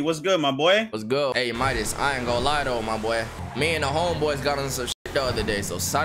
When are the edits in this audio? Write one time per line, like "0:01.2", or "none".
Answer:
0:01.3
0:05.1